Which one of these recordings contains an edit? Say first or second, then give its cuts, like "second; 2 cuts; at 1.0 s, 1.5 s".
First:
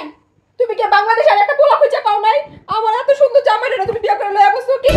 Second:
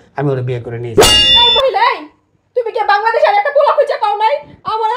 second; 1 cut; at 1.1 s